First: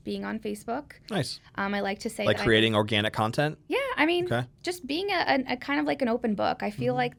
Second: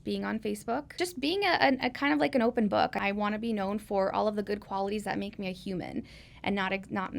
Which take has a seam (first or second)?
second